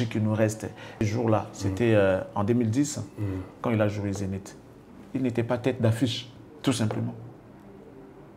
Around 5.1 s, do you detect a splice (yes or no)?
no